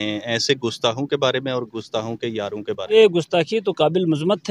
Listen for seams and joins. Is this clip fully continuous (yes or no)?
no